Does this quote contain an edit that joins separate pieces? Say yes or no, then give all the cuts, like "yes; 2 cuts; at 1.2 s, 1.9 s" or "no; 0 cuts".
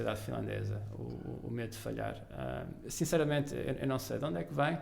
no; 0 cuts